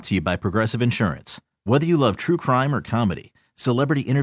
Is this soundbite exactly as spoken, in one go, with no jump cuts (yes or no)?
yes